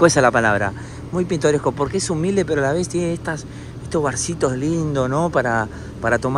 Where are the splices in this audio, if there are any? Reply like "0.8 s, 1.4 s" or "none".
none